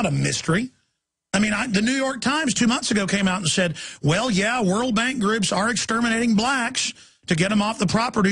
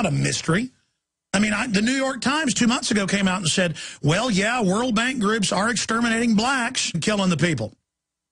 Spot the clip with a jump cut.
first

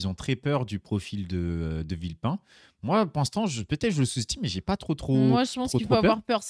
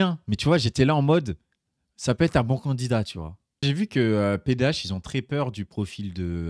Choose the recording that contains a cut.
second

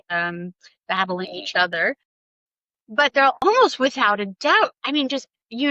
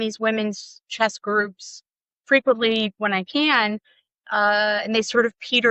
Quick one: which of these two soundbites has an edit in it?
first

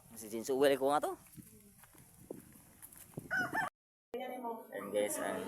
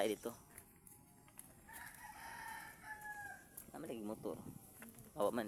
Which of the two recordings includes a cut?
first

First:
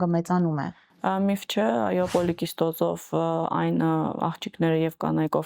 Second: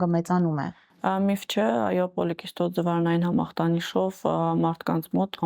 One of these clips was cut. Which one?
first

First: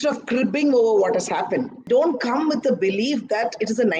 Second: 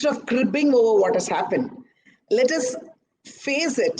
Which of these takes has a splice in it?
first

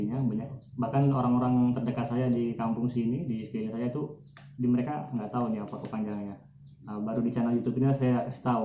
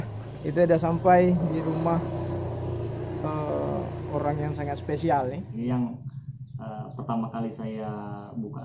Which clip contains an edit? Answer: second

